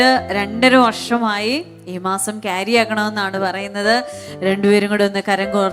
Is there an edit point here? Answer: no; 0 cuts

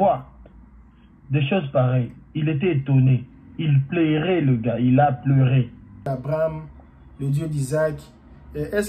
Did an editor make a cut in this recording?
yes; 1 cut; at 6.1 s

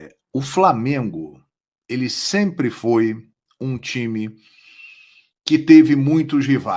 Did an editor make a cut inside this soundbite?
no; 0 cuts

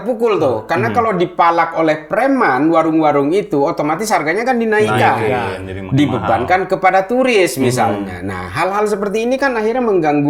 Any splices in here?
no; 0 cuts

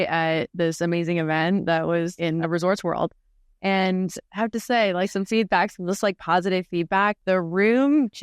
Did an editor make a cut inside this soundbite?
yes; 2 cuts; at 2.4 s, 7.2 s

